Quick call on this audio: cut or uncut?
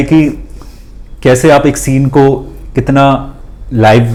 uncut